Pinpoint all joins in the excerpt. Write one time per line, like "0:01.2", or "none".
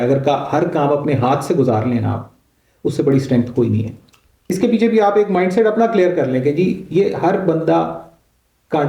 0:04.5

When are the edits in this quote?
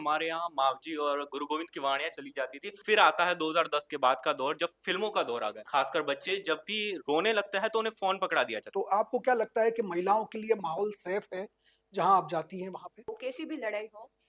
0:02.8
0:05.6
0:08.6
0:13.1

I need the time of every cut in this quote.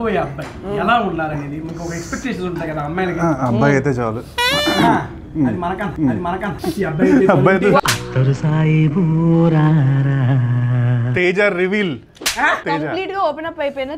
0:06.5
0:10.9
0:12.6

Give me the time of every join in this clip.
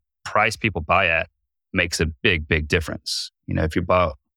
0:01.9

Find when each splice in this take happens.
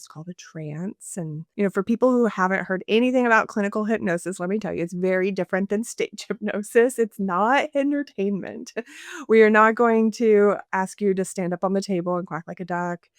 0:01.5

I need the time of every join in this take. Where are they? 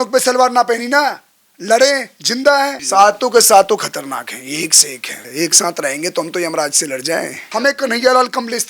0:02.8
0:05.2
0:07.4

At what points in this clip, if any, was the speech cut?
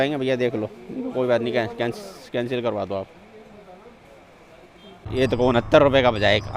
0:05.0

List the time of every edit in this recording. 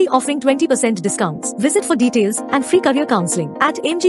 none

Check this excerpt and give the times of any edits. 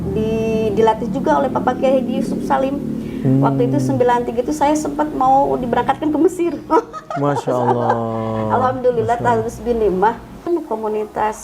0:10.4

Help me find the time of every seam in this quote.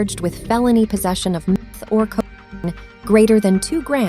0:01.6

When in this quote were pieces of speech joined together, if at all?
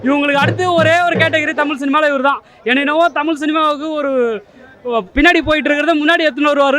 none

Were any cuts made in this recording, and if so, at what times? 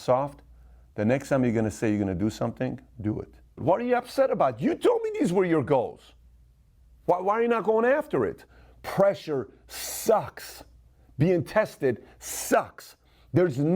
0:03.6
0:08.5

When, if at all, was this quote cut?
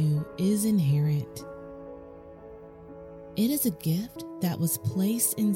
0:01.2
0:03.3

